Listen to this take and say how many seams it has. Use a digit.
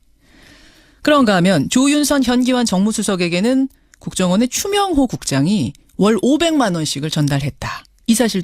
1